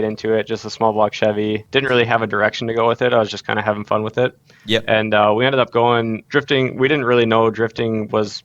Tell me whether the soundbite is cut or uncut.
cut